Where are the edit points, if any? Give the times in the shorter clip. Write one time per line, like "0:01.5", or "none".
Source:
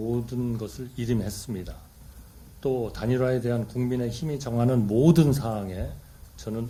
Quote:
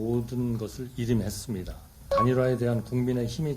0:02.1